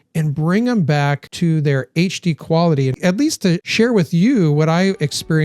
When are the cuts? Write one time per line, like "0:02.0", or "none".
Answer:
0:03.1